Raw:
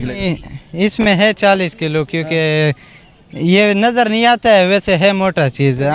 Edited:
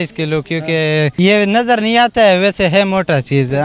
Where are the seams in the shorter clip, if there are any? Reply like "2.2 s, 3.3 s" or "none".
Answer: 1.1 s